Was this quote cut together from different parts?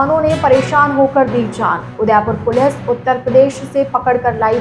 no; 0 cuts

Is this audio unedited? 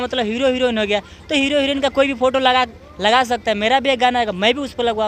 yes; 0 cuts

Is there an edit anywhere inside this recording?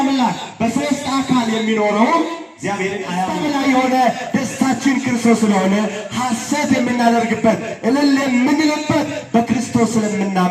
yes; 1 cut; at 3.3 s

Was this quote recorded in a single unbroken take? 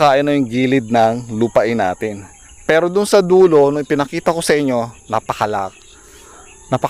yes; 0 cuts

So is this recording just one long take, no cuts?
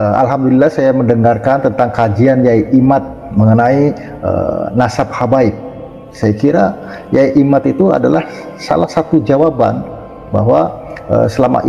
yes; 0 cuts

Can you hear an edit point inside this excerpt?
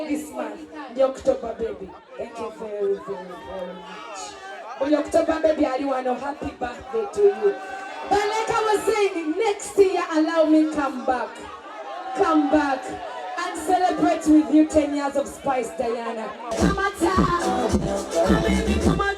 yes; 1 cut; at 16.5 s

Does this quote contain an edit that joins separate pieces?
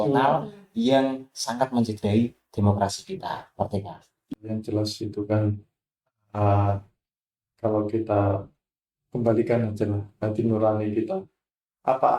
yes; 1 cut; at 4.3 s

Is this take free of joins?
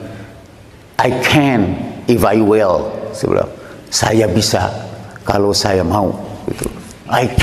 yes; 0 cuts

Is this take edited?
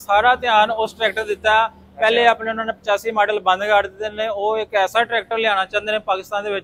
no; 0 cuts

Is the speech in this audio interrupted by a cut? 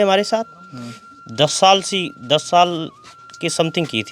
no; 0 cuts

